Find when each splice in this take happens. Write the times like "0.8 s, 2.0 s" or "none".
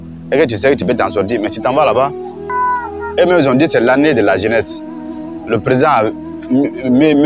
2.5 s